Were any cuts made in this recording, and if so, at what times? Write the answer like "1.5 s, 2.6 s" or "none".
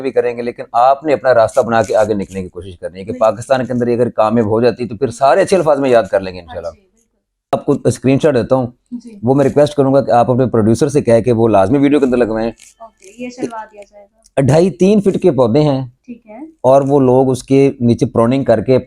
7.5 s